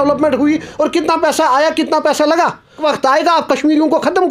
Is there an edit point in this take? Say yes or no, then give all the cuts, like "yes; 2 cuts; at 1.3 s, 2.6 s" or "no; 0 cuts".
yes; 1 cut; at 2.8 s